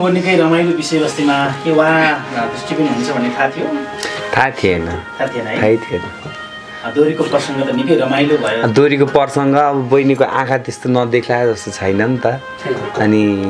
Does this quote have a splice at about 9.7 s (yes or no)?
no